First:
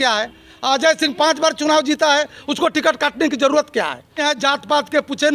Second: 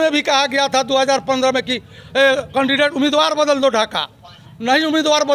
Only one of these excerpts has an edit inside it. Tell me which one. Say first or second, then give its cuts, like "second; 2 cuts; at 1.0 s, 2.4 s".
first; 1 cut; at 4.2 s